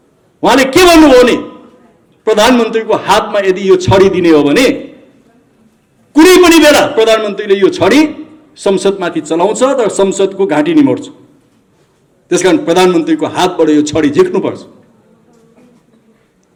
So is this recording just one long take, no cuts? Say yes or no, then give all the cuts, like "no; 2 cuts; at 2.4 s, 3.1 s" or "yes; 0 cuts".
yes; 0 cuts